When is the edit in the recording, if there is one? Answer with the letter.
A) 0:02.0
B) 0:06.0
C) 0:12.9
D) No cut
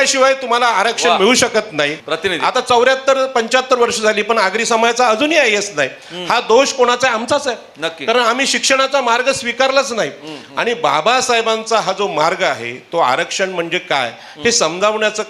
A